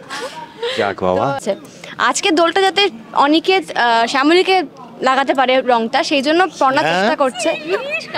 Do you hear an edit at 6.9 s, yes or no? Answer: no